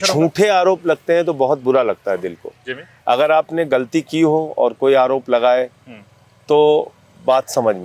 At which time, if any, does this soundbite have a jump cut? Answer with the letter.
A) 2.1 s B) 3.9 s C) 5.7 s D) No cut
D